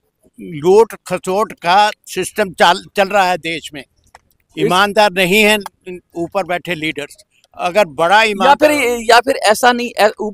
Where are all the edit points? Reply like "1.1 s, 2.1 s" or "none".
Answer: none